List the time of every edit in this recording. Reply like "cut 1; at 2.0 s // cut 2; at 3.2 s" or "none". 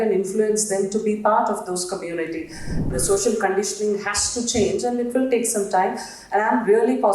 cut 1; at 2.9 s